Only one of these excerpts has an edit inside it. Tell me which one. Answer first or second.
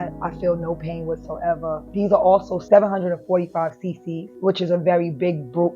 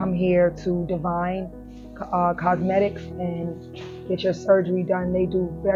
first